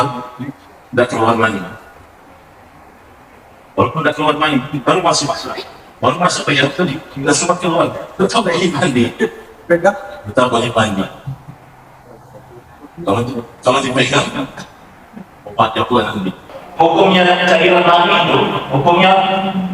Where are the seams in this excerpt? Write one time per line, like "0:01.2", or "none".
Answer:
0:16.5